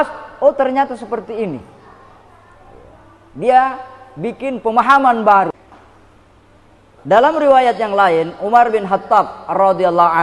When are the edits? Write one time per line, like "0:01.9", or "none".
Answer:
0:05.6